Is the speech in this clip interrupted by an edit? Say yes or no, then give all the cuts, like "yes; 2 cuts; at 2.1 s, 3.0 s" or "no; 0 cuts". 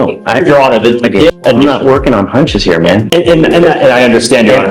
yes; 1 cut; at 1.3 s